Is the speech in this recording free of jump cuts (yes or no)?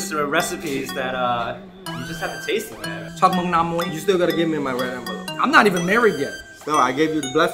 no